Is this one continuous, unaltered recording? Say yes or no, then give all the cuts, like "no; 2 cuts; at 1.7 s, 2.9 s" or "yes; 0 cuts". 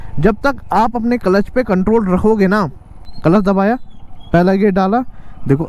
no; 1 cut; at 3.1 s